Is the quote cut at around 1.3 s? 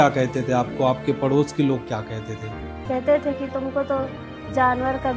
no; 1 cut; at 2.8 s

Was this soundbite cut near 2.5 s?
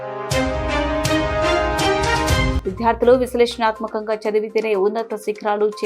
yes; 1 cut; at 2.5 s

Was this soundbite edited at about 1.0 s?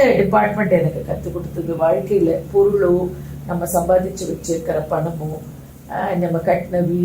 no; 0 cuts

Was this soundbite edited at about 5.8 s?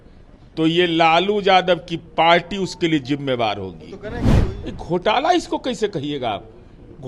no; 1 cut; at 4.2 s

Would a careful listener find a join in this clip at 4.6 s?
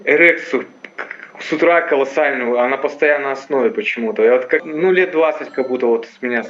yes; 1 cut; at 4.6 s

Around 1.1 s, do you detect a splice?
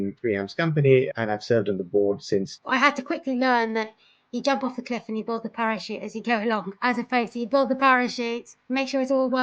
yes; 3 cuts; at 1.1 s, 2.5 s, 6.7 s

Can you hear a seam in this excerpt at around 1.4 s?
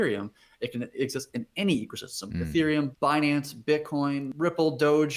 no; 2 cuts; at 2.9 s, 4.3 s

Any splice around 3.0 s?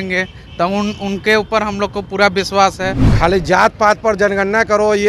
yes; 1 cut; at 3.0 s

